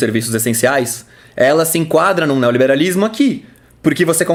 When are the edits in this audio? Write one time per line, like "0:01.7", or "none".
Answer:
none